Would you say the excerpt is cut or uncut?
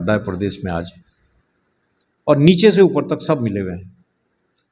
uncut